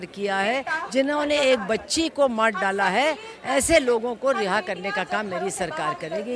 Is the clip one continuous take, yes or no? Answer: yes